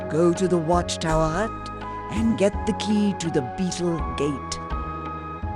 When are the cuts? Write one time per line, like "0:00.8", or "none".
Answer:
0:04.5